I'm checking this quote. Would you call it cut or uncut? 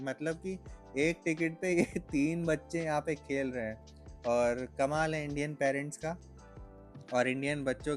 uncut